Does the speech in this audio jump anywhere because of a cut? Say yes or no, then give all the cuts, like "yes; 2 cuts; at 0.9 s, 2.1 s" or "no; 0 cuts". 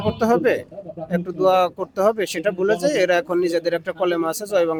no; 0 cuts